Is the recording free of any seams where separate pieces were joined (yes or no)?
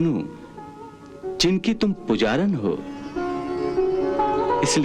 no